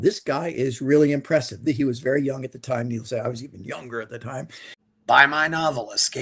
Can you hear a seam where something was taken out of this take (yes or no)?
yes